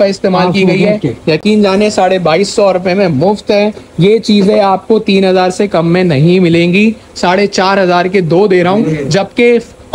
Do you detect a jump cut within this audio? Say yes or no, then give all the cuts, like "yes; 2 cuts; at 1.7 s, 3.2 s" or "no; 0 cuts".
no; 0 cuts